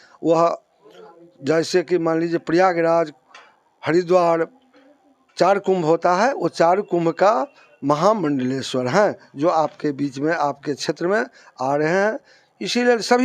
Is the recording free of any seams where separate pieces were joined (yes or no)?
yes